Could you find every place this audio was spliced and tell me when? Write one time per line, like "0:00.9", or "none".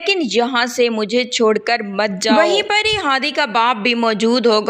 none

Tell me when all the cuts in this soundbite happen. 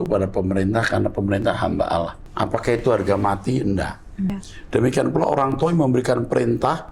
0:02.2
0:04.5

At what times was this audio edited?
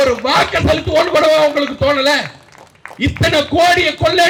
none

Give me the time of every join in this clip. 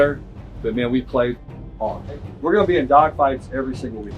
0:02.3

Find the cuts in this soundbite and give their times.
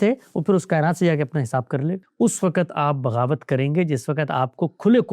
0:02.0

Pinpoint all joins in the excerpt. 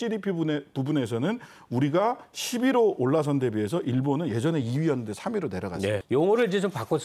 0:06.0

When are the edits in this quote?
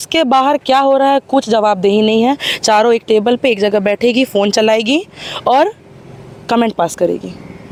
none

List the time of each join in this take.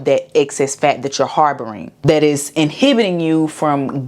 0:01.8

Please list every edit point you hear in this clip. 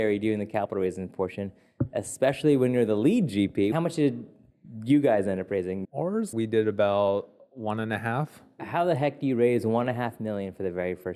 0:03.7
0:05.9
0:08.6

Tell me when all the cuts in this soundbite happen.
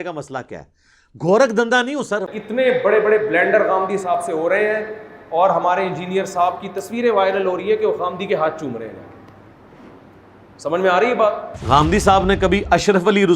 0:02.3
0:11.5

